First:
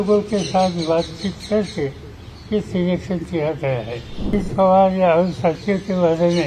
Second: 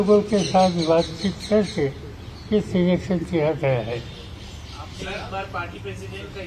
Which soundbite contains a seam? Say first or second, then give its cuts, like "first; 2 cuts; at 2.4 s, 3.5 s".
first; 1 cut; at 4.3 s